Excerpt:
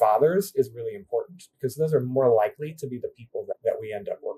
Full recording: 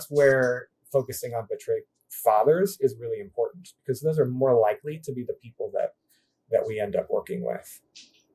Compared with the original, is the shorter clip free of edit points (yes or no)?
no